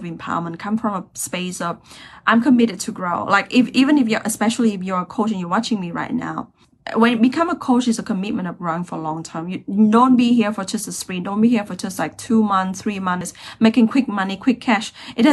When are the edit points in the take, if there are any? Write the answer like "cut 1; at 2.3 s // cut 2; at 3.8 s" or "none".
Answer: cut 1; at 13.3 s